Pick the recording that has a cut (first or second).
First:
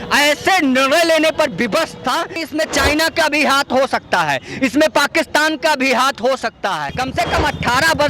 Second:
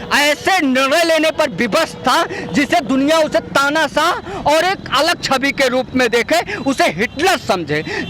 first